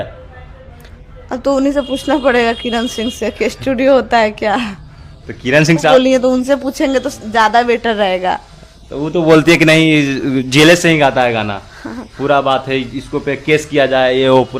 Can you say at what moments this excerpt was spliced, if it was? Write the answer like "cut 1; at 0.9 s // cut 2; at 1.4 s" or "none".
cut 1; at 5.9 s